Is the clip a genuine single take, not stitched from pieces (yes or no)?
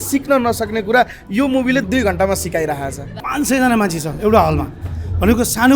no